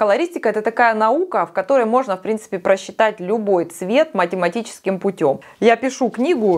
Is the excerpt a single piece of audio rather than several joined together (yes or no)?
yes